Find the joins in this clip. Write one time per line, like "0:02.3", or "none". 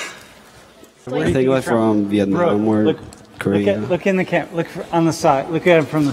0:01.1

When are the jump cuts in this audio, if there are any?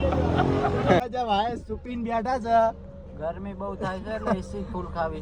0:01.0

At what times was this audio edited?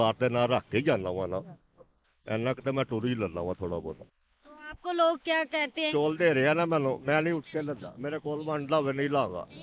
0:05.9

